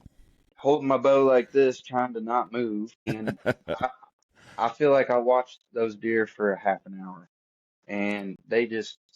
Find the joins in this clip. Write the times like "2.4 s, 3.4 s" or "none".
3.1 s